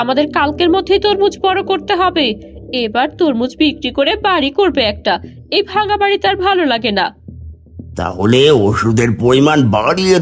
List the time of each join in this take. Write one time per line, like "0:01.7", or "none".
none